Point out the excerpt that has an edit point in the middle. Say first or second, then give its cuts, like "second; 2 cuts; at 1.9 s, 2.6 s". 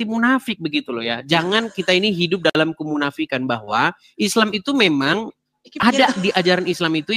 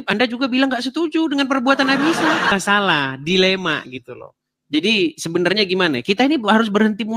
second; 1 cut; at 2.5 s